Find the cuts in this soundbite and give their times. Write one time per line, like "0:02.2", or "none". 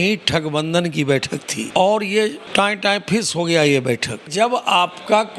0:01.6
0:02.4
0:04.3